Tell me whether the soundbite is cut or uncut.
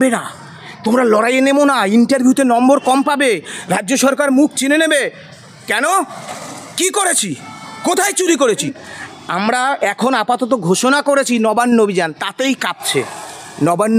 cut